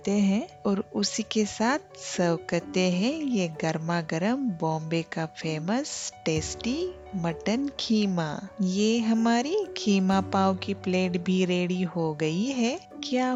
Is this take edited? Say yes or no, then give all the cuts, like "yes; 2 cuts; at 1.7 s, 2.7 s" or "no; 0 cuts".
no; 0 cuts